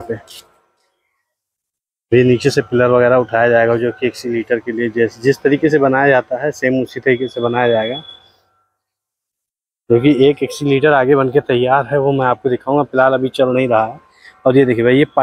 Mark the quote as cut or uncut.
uncut